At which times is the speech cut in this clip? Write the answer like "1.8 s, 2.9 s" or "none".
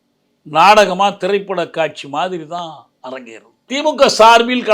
3.7 s